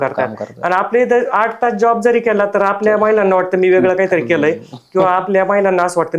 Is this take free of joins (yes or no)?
yes